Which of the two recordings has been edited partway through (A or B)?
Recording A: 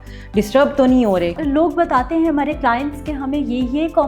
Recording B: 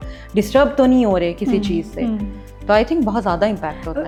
A